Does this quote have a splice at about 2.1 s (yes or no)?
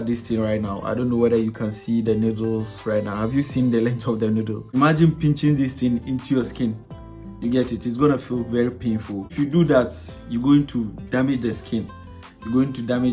no